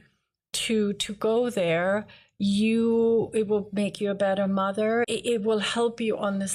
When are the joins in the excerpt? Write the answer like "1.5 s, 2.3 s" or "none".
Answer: 5.1 s

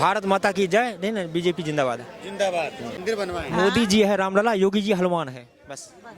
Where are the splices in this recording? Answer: 2.9 s

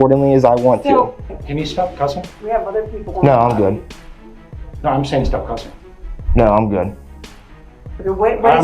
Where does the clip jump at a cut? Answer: 1.2 s

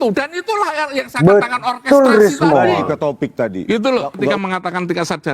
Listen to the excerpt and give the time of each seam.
4.4 s

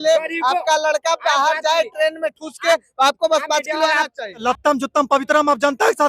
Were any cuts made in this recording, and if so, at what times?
4.4 s

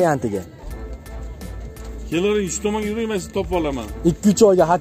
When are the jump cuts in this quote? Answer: none

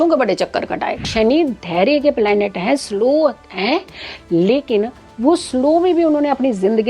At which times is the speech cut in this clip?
1.0 s

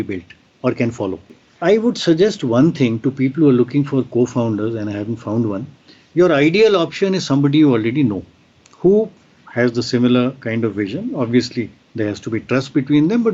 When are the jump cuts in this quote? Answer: 1.4 s

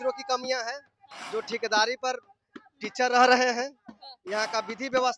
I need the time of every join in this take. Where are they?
none

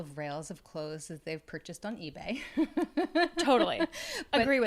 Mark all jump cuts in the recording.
none

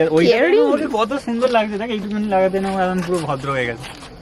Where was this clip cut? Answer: none

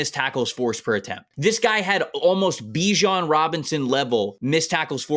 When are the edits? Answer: 1.3 s, 4.4 s

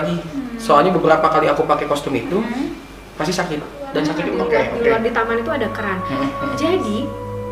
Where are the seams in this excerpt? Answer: 4.4 s

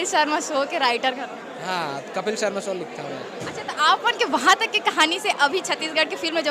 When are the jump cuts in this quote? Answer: none

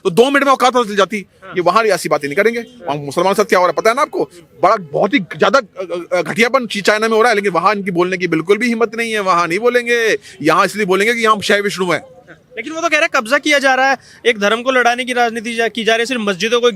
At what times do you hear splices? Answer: none

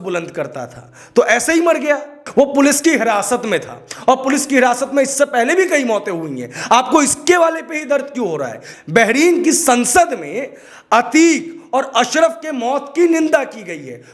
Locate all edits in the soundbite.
2.1 s, 8.6 s

